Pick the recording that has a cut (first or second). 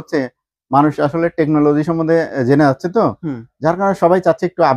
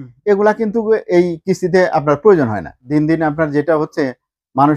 second